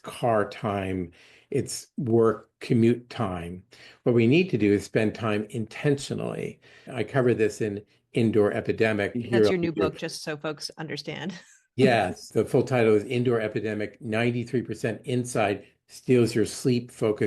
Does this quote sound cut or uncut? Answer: cut